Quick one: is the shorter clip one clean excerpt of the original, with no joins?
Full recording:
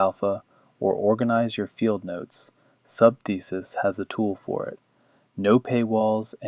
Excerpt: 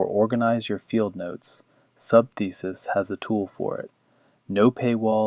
yes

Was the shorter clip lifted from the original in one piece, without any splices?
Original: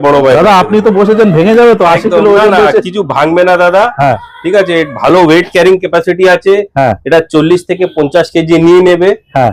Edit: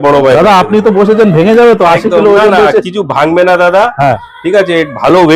yes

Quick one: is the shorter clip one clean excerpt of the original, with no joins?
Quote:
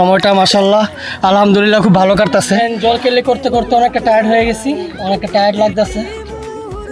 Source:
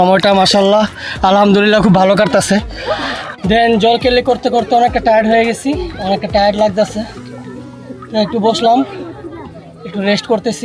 no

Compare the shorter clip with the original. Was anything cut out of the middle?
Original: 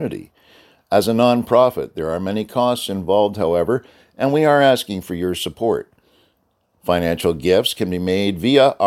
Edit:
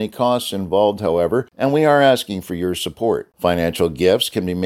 yes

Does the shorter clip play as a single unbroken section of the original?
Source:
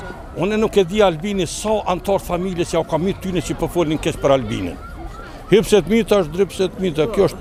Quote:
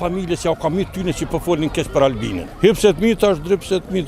no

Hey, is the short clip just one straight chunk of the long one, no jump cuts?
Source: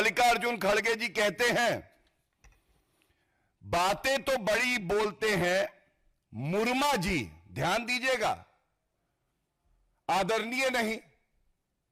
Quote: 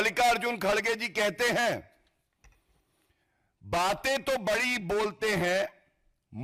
yes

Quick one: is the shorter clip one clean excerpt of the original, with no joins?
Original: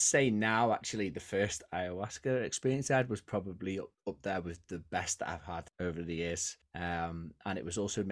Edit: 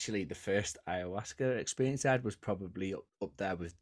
yes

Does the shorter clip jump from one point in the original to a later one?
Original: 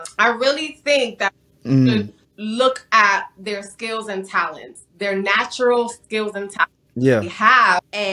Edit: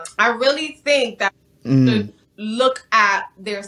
no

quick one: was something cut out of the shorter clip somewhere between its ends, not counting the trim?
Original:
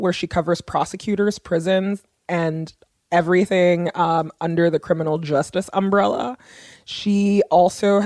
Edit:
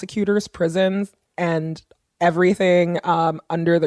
no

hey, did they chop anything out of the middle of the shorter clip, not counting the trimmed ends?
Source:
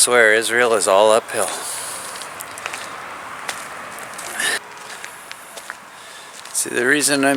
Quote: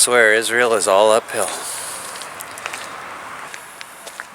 yes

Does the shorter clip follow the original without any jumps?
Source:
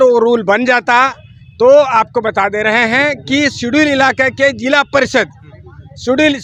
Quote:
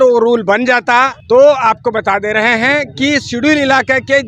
no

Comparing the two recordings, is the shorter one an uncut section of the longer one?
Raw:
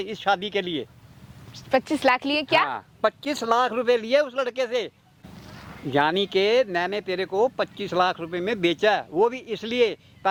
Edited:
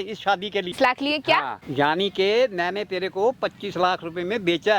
no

